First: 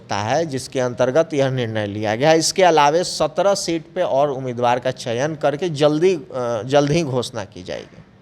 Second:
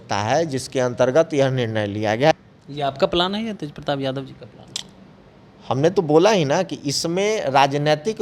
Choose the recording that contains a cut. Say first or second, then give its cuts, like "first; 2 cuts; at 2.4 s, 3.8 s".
second; 1 cut; at 2.3 s